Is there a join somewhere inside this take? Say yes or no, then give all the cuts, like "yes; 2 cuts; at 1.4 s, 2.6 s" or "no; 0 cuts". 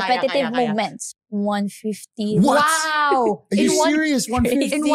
yes; 1 cut; at 1.0 s